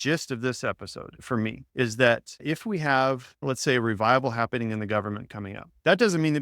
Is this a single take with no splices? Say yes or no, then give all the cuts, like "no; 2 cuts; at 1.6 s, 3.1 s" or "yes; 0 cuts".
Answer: no; 3 cuts; at 1.2 s, 2.3 s, 3.3 s